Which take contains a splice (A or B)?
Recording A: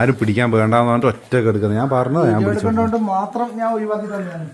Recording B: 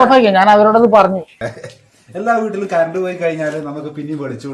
B